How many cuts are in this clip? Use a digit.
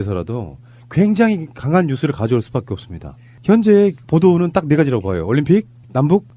1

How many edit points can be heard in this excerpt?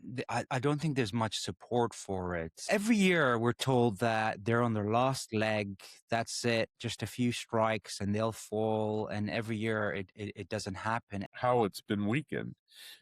2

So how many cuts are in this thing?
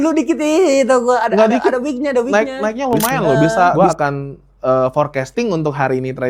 1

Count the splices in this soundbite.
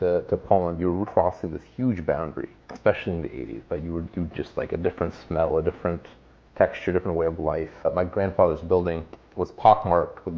3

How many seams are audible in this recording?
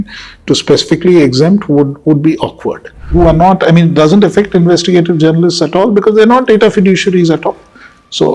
1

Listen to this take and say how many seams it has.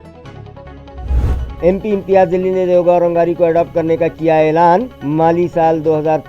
1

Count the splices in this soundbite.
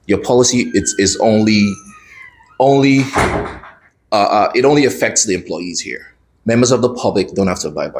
0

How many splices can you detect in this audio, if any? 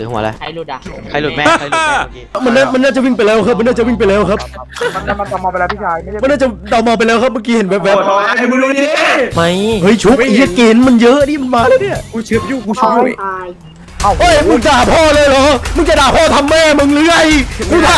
2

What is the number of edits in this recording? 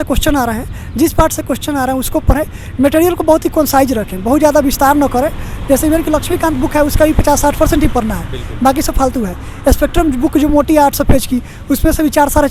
0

